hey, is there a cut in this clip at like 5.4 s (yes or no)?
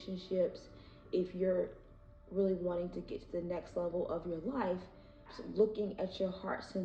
yes